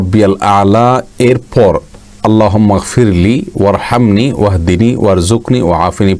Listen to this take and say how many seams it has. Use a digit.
0